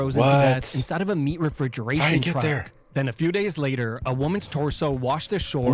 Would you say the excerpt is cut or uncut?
uncut